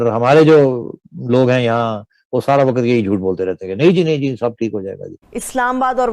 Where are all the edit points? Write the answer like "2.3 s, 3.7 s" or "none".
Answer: 5.1 s